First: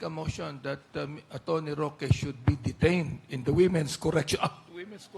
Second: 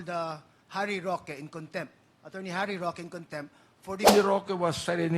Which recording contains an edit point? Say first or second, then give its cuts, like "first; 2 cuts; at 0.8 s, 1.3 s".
second; 1 cut; at 4.1 s